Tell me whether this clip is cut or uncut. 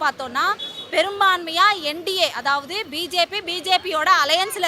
uncut